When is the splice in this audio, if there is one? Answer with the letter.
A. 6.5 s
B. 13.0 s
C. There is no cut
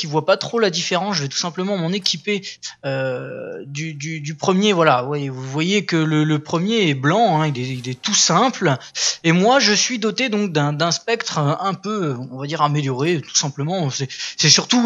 C